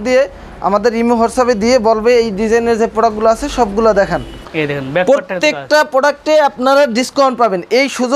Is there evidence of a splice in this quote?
yes; 1 cut; at 4.4 s

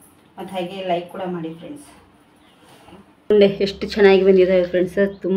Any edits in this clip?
yes; 1 cut; at 3.3 s

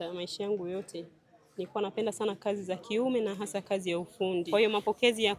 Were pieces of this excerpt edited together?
yes; 1 cut; at 4.5 s

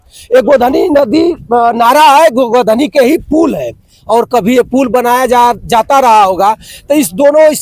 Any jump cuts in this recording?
no; 0 cuts

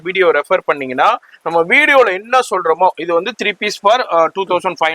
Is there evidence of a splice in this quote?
no; 0 cuts

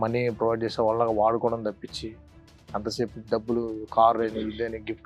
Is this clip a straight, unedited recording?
yes; 0 cuts

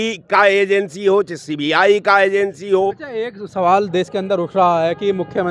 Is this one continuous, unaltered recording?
yes; 0 cuts

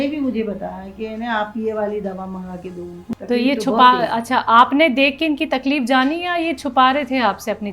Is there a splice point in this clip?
no; 0 cuts

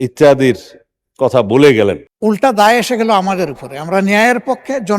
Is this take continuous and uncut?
no; 1 cut; at 2.1 s

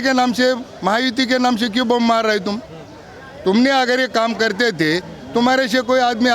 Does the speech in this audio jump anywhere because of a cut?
no; 0 cuts

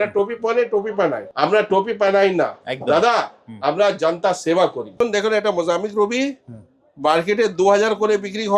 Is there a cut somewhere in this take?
yes; 2 cuts; at 1.2 s, 5.0 s

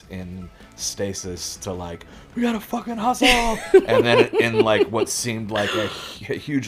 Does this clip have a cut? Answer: no; 0 cuts

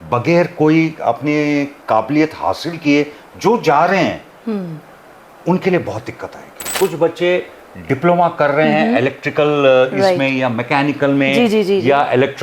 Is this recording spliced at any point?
yes; 1 cut; at 6.6 s

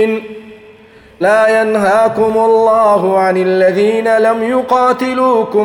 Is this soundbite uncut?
no; 1 cut; at 1.1 s

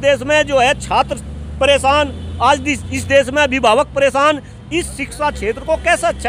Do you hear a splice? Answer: no; 0 cuts

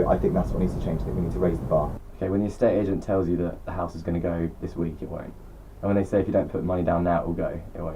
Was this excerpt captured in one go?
yes; 0 cuts

